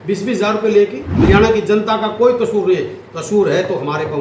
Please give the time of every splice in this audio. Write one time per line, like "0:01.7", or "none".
0:01.1